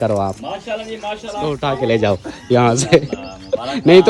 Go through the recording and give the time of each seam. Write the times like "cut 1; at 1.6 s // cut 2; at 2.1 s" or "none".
cut 1; at 1.6 s